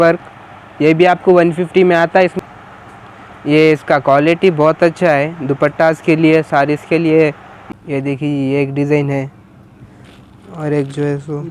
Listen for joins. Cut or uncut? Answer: cut